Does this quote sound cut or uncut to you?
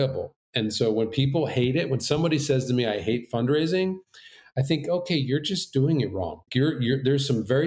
uncut